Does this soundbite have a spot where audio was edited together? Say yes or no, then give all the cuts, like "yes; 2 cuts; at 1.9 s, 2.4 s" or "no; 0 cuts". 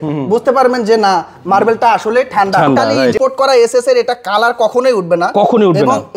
yes; 1 cut; at 3.1 s